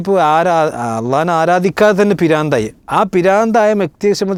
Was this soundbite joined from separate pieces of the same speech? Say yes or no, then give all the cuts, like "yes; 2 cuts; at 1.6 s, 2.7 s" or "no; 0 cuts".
no; 0 cuts